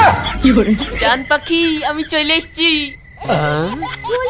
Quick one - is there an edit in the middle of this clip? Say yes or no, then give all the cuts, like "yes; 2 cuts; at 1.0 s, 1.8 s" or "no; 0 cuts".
no; 0 cuts